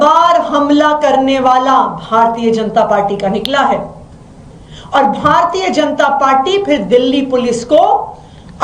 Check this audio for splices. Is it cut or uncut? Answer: uncut